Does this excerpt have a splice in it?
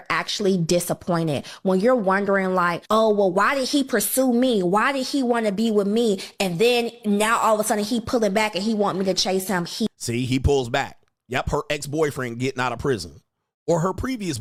no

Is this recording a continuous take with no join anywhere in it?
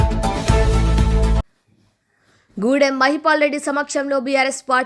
no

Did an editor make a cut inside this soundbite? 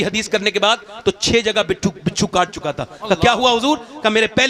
no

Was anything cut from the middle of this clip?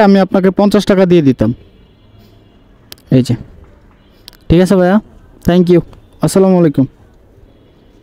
no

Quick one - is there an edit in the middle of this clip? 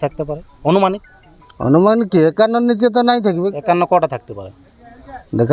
no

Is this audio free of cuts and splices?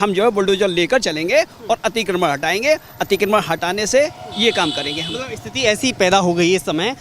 yes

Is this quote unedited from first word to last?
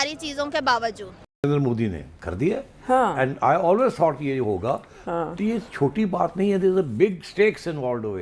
no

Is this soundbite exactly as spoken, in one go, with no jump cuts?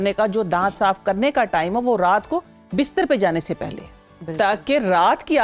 yes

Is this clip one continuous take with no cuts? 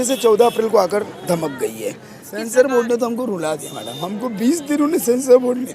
no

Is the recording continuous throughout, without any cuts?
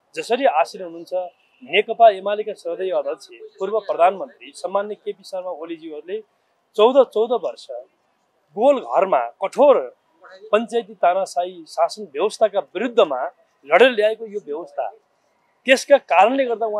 yes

